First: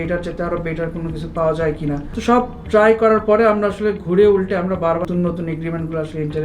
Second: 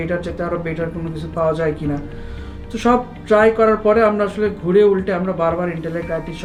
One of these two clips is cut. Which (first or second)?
first